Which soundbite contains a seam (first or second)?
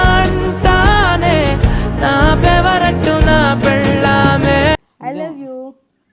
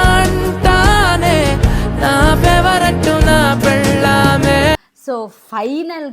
second